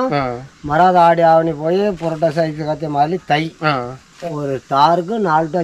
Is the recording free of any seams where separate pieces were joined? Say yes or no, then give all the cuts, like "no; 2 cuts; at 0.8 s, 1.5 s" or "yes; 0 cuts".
no; 1 cut; at 4.1 s